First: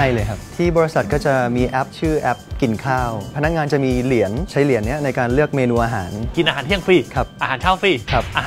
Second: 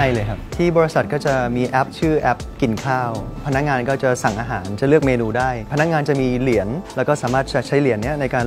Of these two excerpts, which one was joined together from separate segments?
first; 3 cuts; at 3.3 s, 4.5 s, 6.2 s

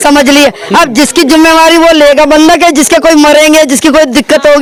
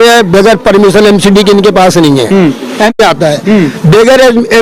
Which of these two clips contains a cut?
second; 1 cut; at 3.0 s

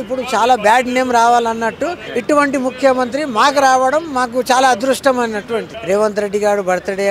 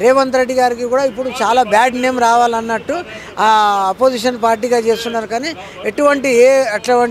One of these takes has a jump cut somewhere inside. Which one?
first; 2 cuts; at 2.1 s, 5.7 s

